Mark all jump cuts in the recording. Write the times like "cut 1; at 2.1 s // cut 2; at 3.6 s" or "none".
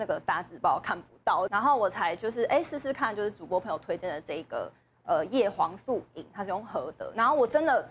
cut 1; at 1.5 s